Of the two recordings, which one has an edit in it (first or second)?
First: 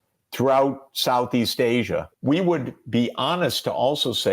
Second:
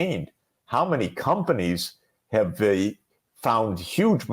first